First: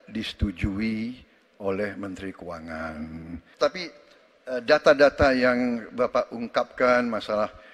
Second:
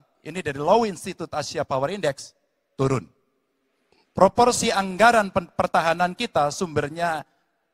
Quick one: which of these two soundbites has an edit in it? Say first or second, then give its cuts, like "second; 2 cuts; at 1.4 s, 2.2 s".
first; 1 cut; at 3.4 s